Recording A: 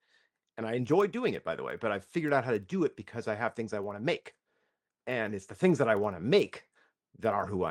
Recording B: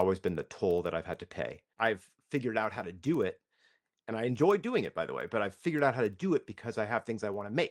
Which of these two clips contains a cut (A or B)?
B